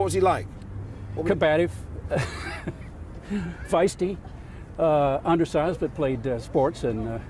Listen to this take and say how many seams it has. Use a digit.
0